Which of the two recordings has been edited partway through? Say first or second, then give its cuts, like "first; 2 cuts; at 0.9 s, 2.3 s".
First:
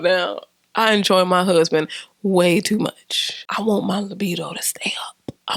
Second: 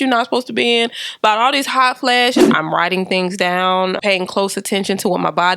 second; 2 cuts; at 2.5 s, 4.0 s